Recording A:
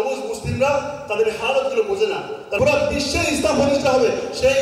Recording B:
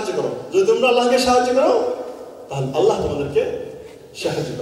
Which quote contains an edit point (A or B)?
A